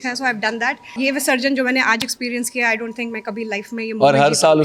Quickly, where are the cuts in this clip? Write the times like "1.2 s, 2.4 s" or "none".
0.9 s